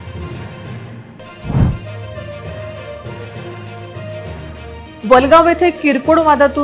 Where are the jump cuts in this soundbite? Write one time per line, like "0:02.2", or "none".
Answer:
none